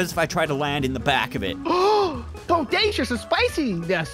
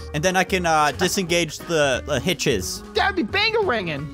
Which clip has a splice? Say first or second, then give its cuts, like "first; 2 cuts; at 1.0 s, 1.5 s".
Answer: second; 2 cuts; at 1.0 s, 2.0 s